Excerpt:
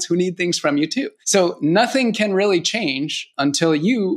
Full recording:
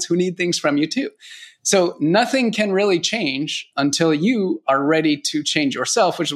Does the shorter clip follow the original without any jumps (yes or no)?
no